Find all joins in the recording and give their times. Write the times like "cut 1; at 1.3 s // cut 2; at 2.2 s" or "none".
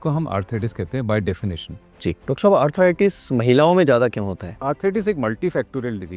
cut 1; at 2.2 s // cut 2; at 4.4 s